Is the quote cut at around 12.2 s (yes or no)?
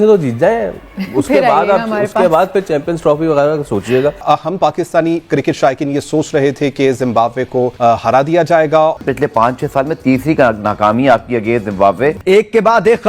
yes